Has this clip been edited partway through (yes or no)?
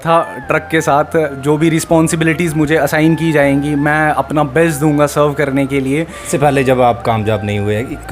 yes